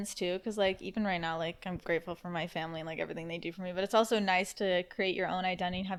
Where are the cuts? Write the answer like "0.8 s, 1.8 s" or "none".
none